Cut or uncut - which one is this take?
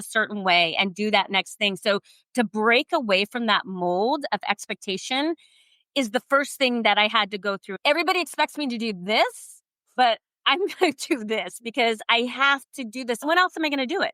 cut